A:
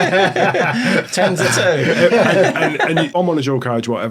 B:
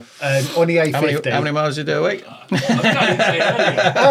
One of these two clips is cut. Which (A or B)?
A